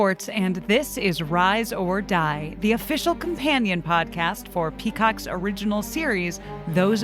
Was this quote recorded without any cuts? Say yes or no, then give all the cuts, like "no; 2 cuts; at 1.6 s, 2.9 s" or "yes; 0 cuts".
yes; 0 cuts